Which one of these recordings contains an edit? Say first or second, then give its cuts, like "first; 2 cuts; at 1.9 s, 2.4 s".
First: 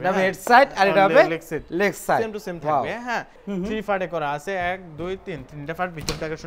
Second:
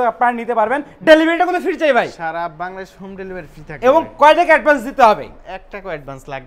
first; 1 cut; at 3.3 s